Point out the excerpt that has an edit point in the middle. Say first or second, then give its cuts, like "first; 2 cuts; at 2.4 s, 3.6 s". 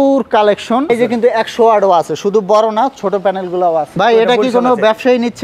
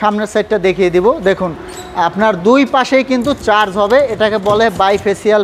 first; 2 cuts; at 0.9 s, 3.9 s